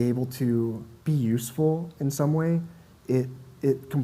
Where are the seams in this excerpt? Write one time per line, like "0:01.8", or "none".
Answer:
0:00.9

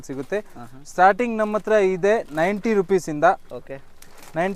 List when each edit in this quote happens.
none

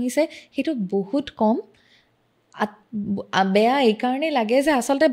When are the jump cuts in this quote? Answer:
none

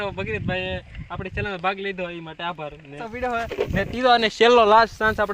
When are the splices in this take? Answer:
0:03.1

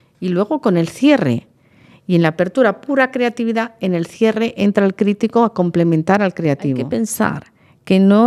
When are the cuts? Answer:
0:06.9

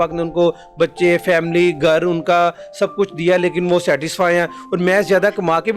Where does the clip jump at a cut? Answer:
none

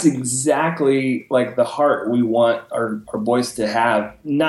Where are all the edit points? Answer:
none

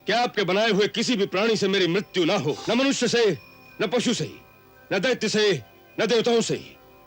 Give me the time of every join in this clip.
0:02.6

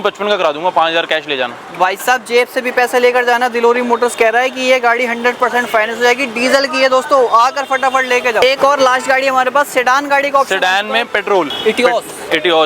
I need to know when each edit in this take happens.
none

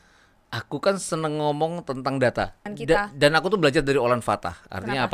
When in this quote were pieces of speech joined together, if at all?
0:02.8

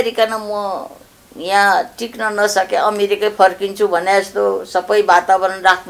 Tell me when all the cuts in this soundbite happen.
none

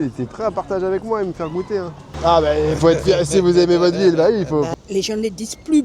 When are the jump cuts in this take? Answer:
0:02.0
0:04.7

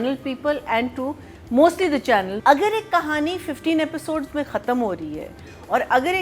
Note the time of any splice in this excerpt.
0:02.3

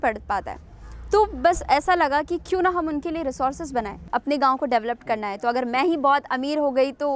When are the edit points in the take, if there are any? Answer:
0:04.0

